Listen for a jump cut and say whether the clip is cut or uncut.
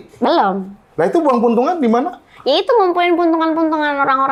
uncut